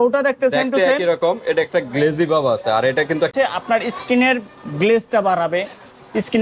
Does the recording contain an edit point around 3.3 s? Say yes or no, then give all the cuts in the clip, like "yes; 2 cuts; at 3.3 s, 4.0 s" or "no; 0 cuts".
yes; 1 cut; at 3.3 s